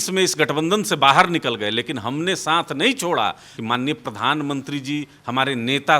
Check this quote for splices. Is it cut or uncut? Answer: cut